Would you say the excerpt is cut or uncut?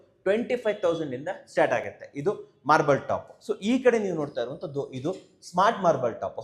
uncut